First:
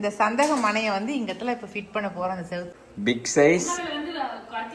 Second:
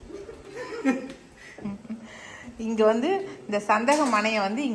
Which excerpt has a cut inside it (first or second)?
first